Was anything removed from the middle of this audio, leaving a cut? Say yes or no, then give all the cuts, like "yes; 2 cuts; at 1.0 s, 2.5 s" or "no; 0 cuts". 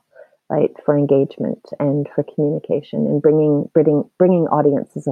no; 0 cuts